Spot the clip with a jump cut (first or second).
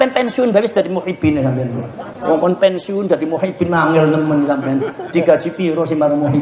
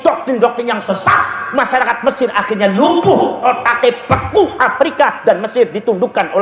first